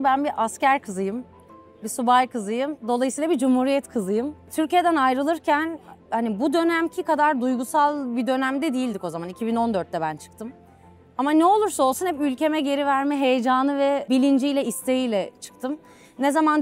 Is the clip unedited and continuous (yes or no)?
yes